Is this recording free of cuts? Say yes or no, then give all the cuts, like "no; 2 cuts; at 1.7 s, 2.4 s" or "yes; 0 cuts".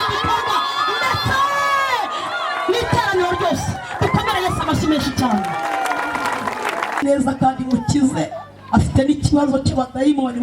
no; 1 cut; at 7.0 s